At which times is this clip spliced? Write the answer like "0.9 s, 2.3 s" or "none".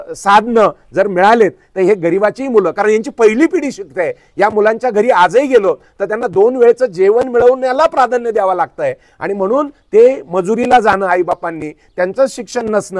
none